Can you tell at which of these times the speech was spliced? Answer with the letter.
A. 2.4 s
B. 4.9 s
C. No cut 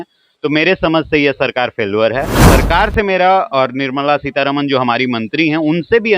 A